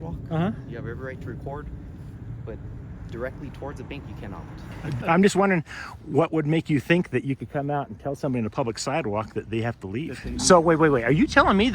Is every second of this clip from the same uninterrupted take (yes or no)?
no